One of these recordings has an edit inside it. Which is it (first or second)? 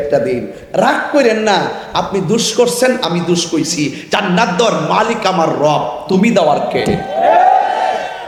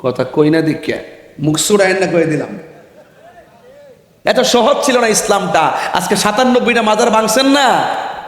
second